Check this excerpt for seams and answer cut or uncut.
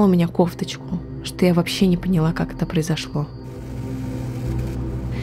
cut